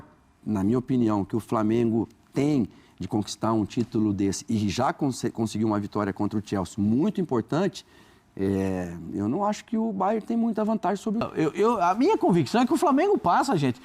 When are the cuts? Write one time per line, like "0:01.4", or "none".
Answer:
0:11.3